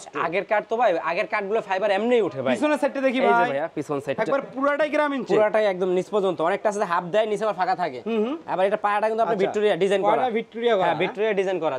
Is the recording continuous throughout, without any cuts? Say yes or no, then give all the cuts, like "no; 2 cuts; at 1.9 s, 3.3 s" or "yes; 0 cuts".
yes; 0 cuts